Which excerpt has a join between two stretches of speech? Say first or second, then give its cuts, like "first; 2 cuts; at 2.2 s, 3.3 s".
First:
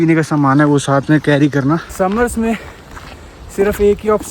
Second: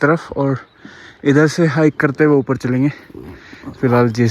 first; 1 cut; at 1.9 s